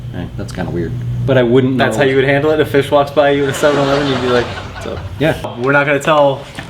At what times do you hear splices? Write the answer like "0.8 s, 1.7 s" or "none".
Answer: 5.4 s